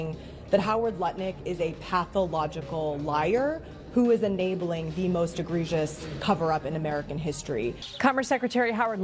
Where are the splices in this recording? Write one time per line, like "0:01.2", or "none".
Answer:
0:07.9